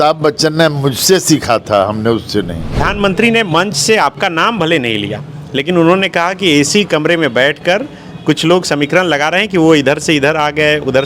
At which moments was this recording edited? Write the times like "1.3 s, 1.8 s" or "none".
2.8 s